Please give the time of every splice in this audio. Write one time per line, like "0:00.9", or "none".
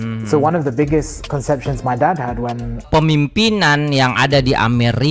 0:02.9